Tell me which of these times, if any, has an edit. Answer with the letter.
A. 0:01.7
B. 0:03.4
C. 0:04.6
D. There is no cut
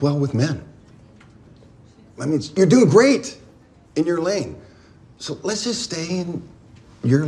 D